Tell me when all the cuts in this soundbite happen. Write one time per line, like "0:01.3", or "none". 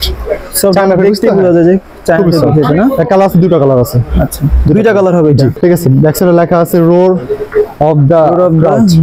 0:05.5